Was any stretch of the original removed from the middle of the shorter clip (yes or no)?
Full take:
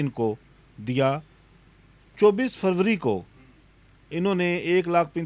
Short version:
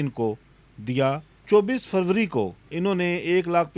yes